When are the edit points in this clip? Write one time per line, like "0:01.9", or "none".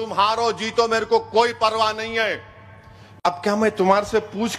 0:03.3